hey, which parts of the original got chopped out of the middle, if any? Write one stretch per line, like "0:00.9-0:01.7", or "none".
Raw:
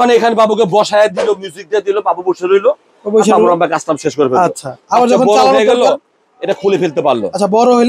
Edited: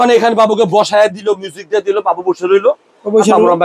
none